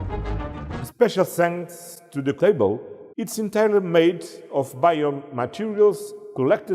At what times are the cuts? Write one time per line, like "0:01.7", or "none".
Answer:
0:00.8
0:02.4
0:03.0